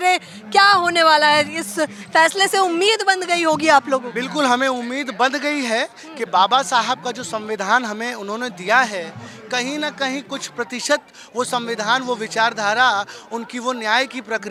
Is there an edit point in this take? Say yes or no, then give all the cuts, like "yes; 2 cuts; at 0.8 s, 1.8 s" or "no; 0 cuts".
no; 0 cuts